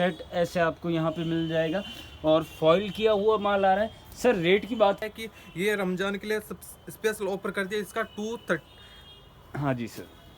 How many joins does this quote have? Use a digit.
1